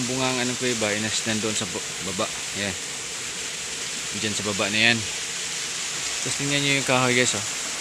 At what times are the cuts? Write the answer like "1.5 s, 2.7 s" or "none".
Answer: none